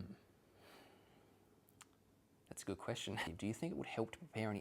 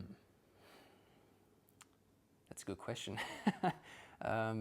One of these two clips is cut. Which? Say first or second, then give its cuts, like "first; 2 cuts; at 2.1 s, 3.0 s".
first; 1 cut; at 3.3 s